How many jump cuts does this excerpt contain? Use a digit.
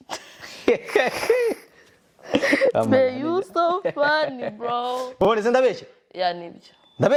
0